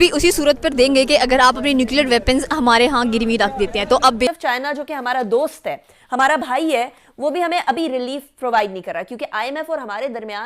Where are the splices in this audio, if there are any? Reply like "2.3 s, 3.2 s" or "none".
4.3 s